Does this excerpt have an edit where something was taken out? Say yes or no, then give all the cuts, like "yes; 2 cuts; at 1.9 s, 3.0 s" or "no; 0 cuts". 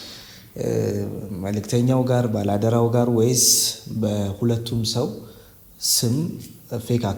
no; 0 cuts